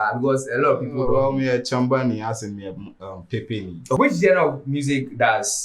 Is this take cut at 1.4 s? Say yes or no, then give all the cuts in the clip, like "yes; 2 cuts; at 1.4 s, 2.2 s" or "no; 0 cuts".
no; 1 cut; at 4.0 s